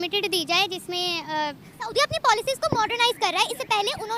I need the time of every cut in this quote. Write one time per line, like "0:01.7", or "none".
0:01.7

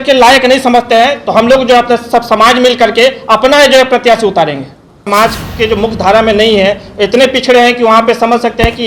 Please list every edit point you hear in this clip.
0:05.1

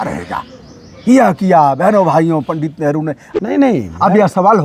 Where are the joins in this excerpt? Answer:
0:03.2

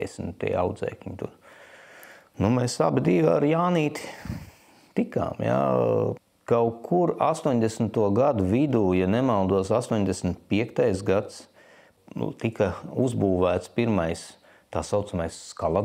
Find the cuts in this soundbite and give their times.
0:06.3
0:11.9

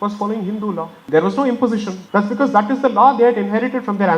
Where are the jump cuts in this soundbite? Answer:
0:01.0
0:02.0

